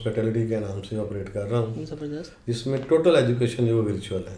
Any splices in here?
no; 0 cuts

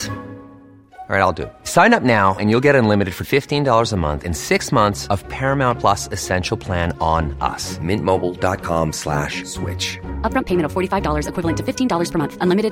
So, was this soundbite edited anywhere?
no; 0 cuts

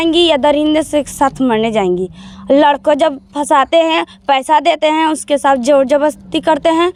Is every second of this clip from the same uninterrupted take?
yes; 0 cuts

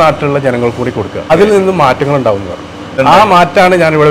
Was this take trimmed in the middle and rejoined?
yes; 2 cuts; at 1.3 s, 2.9 s

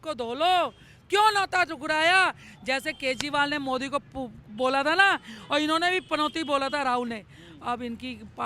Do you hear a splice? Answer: no; 0 cuts

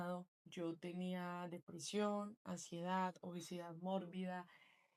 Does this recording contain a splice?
no; 0 cuts

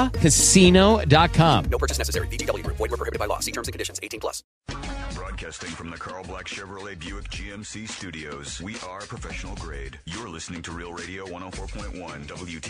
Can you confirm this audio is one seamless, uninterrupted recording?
no; 1 cut; at 4.6 s

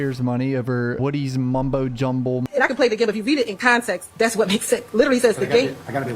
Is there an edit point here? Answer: yes; 2 cuts; at 1.0 s, 2.4 s

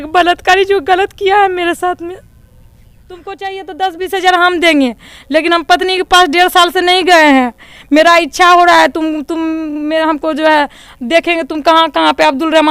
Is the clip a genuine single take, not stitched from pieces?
no; 1 cut; at 3.2 s

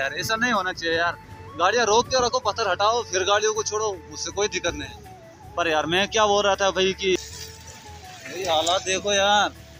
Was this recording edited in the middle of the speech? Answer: no; 0 cuts

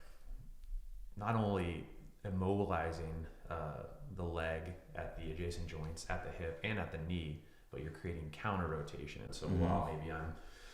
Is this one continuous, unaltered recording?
no; 1 cut; at 9.3 s

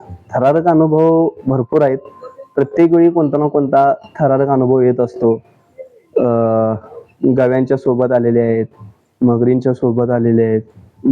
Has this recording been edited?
no; 0 cuts

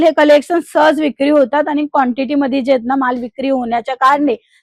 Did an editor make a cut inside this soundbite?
no; 0 cuts

